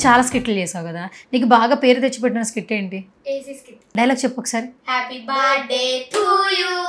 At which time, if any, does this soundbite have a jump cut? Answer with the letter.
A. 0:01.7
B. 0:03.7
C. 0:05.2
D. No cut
B